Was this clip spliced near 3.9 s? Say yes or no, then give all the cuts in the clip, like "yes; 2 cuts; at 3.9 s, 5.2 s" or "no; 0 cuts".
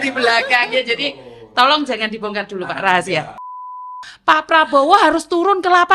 yes; 1 cut; at 3.9 s